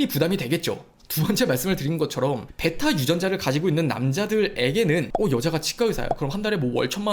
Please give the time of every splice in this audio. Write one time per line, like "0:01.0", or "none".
0:05.1